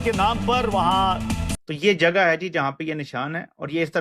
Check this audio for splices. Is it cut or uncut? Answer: cut